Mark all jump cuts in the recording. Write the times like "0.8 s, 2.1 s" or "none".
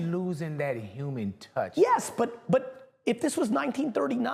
none